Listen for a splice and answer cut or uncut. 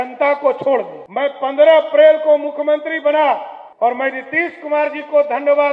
cut